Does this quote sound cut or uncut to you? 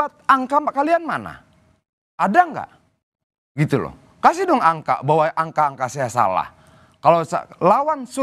uncut